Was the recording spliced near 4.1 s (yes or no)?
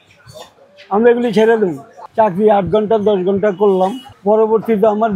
no